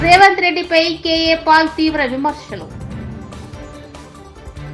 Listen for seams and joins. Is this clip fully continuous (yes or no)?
yes